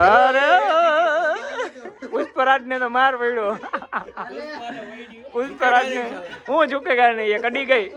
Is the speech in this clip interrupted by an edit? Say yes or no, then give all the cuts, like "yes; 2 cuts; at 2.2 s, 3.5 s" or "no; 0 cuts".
no; 0 cuts